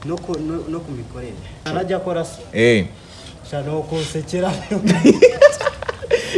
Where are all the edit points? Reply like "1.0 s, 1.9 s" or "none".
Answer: 1.6 s

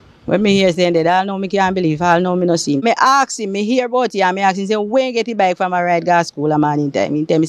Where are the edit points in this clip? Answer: 2.8 s

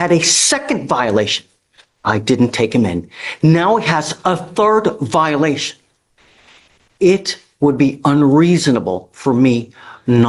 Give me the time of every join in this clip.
none

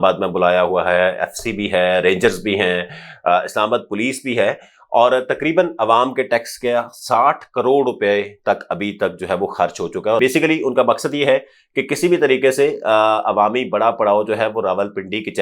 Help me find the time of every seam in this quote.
10.2 s

